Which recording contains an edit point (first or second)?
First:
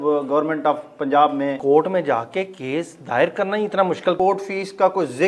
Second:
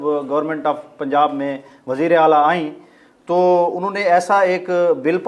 first